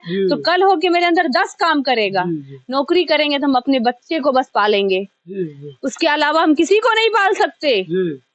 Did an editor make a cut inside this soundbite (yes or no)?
no